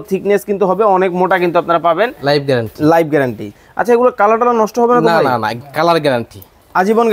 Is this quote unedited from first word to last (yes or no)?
no